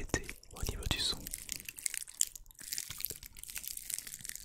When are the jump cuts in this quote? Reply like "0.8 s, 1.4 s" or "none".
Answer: none